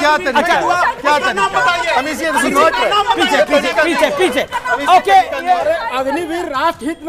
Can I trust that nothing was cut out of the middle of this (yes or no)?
yes